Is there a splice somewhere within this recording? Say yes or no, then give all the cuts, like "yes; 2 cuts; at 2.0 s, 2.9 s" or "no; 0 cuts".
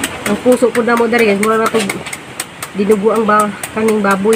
no; 0 cuts